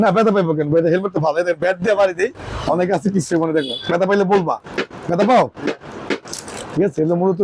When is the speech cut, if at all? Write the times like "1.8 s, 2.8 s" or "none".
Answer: none